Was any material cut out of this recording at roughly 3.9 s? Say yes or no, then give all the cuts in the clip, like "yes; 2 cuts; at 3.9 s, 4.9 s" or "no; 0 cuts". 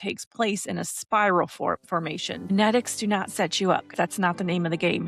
yes; 2 cuts; at 2.5 s, 3.9 s